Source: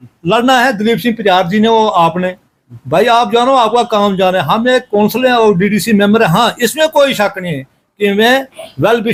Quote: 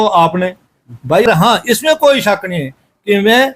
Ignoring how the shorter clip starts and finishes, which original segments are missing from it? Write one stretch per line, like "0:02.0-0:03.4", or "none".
0:03.1-0:06.2